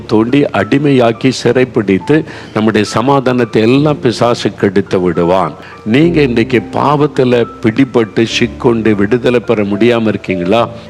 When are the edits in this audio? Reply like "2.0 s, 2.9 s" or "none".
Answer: 5.6 s

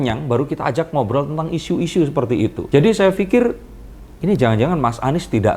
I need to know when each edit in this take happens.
none

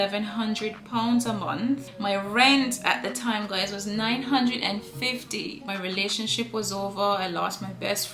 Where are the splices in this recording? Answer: 1.9 s, 5.7 s

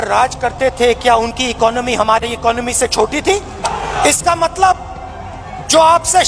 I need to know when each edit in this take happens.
3.7 s

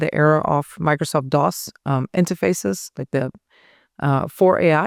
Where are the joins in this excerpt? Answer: none

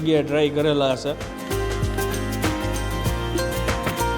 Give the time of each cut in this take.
1.3 s

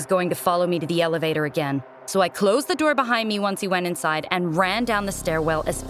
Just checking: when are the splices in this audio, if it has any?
none

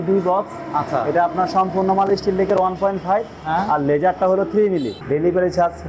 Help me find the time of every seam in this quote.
4.9 s

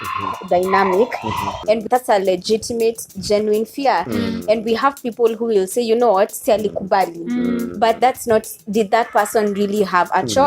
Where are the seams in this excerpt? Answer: 1.7 s

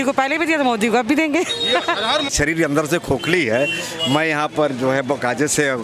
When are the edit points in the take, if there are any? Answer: 2.3 s

